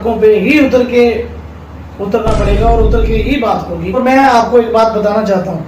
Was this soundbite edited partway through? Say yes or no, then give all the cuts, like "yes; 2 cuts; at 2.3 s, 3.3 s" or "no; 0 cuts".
yes; 1 cut; at 4.0 s